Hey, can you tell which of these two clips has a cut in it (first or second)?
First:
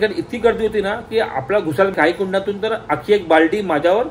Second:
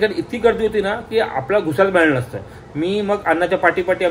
first